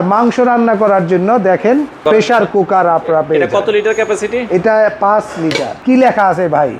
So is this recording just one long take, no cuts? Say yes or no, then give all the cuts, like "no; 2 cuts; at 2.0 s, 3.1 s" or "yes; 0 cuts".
no; 2 cuts; at 2.0 s, 5.7 s